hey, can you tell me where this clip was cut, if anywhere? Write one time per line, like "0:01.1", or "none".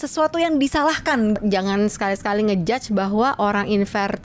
0:01.4